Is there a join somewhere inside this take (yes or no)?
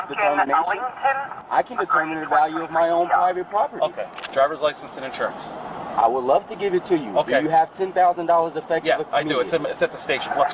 yes